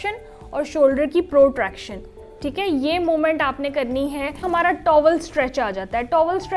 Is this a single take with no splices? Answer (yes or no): no